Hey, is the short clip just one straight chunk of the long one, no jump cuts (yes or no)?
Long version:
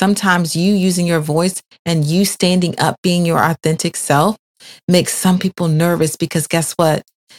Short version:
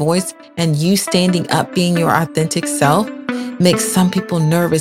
yes